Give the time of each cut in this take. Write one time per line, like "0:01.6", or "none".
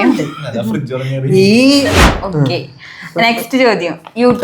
0:02.1